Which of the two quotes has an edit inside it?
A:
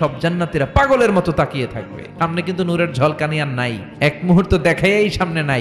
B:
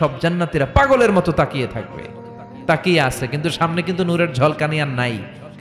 A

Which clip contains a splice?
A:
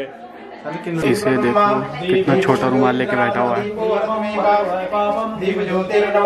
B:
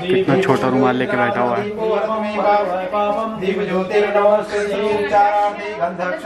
A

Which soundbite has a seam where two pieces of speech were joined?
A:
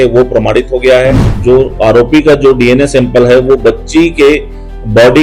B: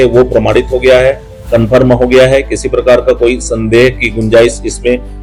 A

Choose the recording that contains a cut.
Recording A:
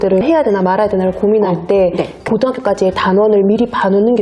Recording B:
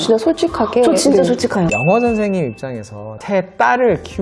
B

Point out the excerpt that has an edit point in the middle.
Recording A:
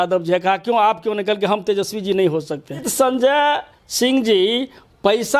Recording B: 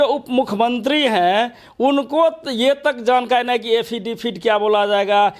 A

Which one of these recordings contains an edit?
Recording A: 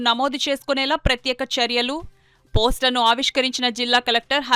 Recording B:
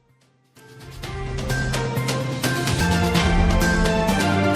B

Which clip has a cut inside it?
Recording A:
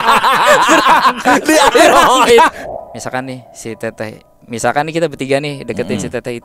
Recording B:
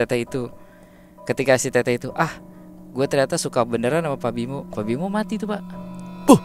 A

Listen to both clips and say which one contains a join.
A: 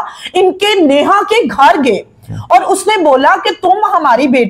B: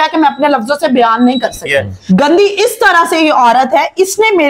B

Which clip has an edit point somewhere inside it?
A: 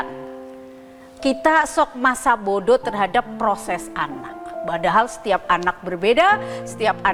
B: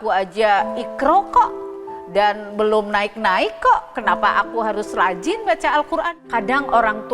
B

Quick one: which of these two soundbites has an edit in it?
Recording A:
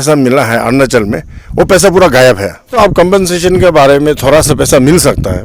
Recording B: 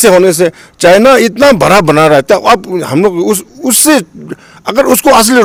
A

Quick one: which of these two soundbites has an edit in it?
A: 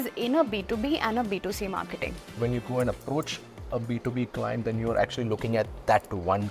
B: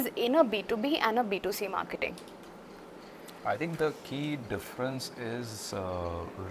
A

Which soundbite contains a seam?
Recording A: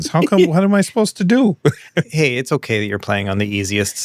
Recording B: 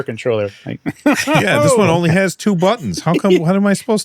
A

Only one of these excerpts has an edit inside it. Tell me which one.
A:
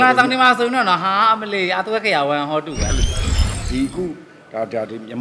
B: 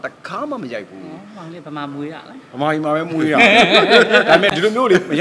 A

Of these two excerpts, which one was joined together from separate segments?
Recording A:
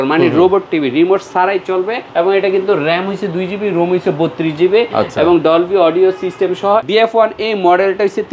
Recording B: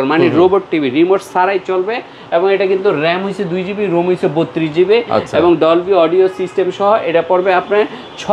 A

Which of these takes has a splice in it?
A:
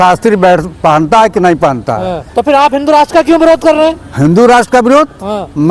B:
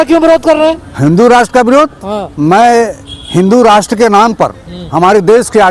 A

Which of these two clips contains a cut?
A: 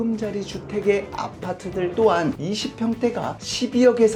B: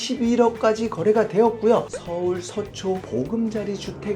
B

